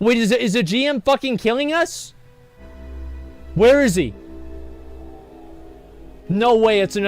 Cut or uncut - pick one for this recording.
cut